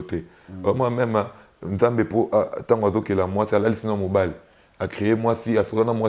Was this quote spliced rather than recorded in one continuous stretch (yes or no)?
no